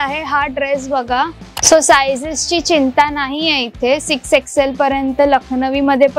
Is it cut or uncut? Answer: cut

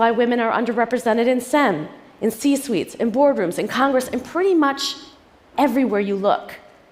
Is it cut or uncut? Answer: cut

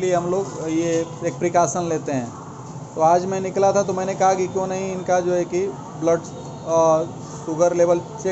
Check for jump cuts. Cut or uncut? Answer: uncut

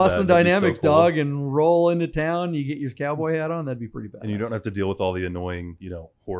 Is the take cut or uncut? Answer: uncut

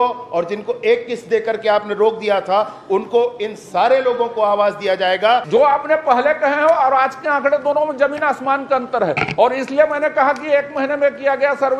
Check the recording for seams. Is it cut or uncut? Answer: cut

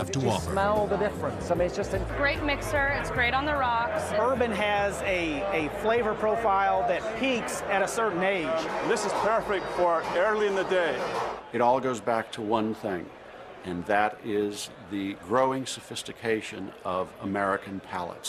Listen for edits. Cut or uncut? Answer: uncut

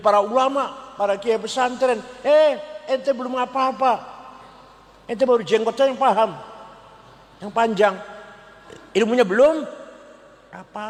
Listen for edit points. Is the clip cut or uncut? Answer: uncut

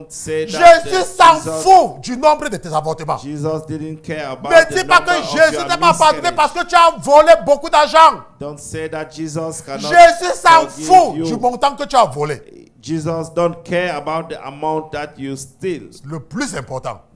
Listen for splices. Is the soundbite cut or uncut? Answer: uncut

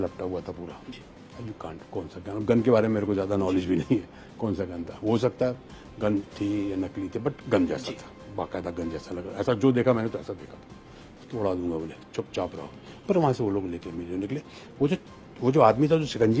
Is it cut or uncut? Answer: uncut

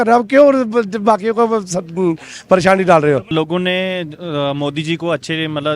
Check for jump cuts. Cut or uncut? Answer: cut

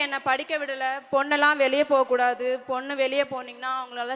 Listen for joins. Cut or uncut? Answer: uncut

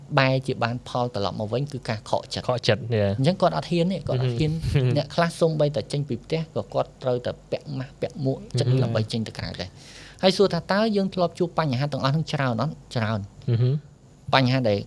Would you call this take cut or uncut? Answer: uncut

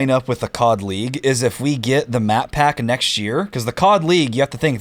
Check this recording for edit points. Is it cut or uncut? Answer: uncut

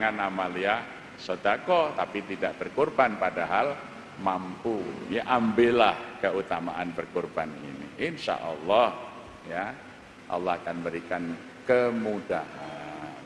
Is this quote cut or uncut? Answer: uncut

